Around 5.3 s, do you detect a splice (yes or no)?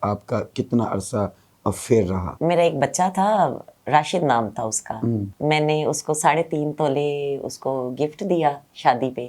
yes